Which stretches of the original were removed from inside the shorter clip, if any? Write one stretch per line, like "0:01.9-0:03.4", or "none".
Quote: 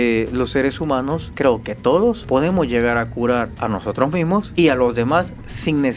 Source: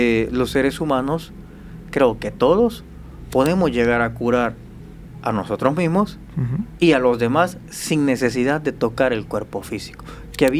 0:01.3-0:01.8
0:02.8-0:03.3
0:04.6-0:05.2
0:06.1-0:06.7